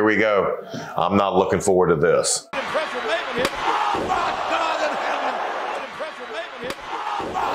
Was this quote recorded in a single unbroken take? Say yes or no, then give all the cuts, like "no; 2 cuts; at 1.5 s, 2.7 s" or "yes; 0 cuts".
yes; 0 cuts